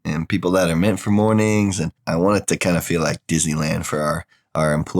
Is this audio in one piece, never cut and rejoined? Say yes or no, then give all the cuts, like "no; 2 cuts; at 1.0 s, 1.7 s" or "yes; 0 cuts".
no; 1 cut; at 1.9 s